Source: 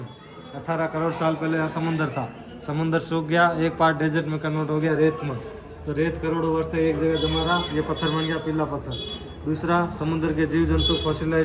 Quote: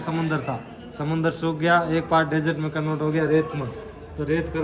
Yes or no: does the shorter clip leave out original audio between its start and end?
no